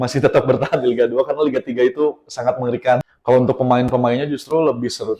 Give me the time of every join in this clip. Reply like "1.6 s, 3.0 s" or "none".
3.0 s